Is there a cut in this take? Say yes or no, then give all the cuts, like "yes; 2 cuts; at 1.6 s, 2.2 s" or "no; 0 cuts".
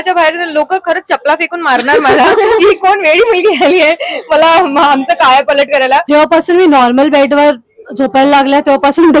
yes; 1 cut; at 6.0 s